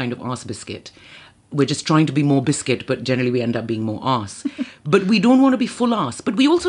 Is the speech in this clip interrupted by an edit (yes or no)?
no